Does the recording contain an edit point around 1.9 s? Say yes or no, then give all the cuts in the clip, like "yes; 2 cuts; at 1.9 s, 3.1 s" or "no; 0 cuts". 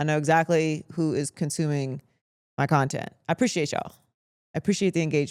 no; 0 cuts